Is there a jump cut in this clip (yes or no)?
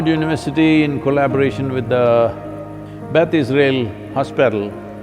no